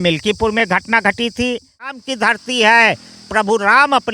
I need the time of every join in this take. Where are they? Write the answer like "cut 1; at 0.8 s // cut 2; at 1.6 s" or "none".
cut 1; at 2.0 s